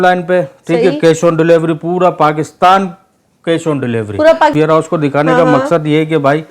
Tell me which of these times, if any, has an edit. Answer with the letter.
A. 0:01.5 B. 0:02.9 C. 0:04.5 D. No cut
C